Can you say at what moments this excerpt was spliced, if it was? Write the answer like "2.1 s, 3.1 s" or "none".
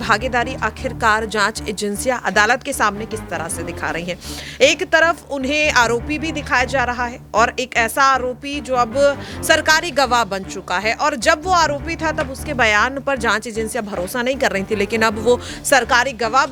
none